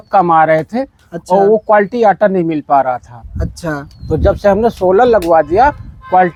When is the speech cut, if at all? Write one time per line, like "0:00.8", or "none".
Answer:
none